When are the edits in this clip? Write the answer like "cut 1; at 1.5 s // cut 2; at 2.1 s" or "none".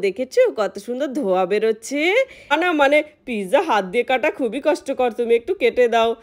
cut 1; at 2.5 s